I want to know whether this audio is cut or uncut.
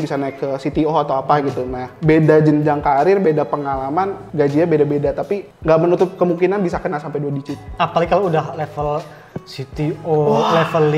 uncut